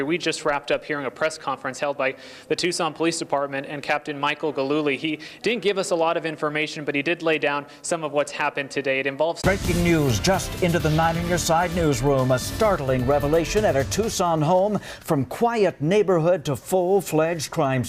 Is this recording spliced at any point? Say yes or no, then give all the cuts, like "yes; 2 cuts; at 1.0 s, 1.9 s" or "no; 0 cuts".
no; 0 cuts